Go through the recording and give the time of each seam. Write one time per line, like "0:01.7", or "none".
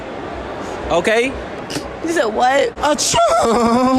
0:02.8